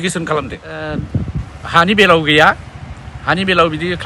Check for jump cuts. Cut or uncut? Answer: cut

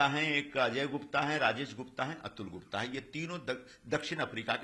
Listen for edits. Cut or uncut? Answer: uncut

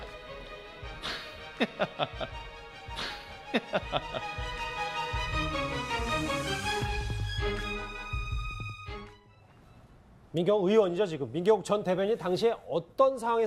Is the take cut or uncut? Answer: uncut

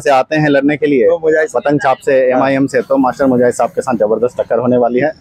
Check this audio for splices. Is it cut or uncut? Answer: uncut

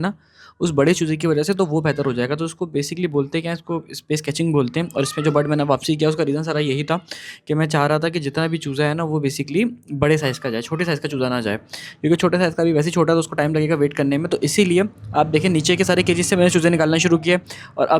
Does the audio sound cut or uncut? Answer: uncut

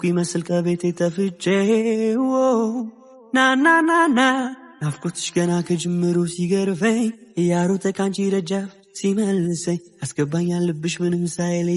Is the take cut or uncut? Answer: uncut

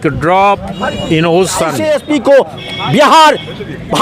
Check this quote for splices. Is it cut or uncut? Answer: cut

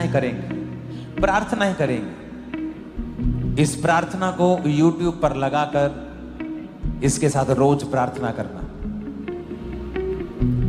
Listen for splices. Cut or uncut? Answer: cut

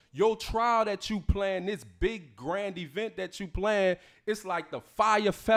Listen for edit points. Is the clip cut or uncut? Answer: uncut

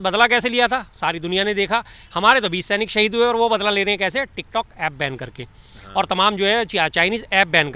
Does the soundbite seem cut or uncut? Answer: uncut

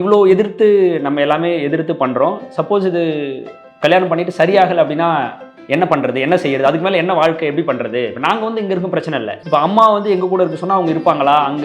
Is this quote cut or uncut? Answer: cut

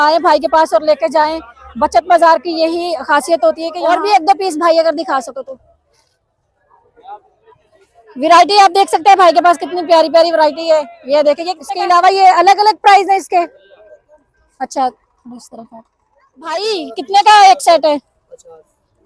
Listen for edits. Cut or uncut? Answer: cut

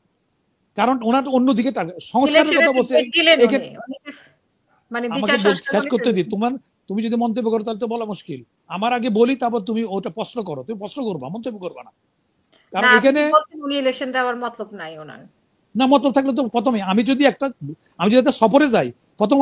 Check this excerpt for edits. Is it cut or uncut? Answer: uncut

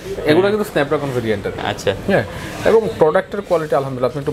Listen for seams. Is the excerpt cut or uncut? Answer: uncut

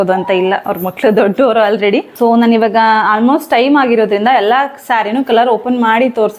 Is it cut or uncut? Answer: cut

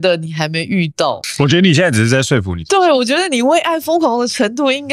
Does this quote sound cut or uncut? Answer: cut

